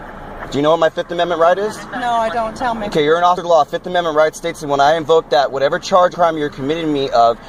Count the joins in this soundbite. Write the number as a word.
zero